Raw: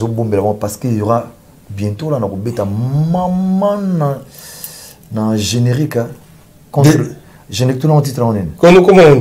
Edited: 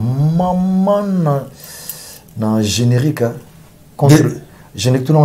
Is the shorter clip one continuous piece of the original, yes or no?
yes